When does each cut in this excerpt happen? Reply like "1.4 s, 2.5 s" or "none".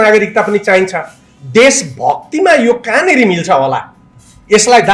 none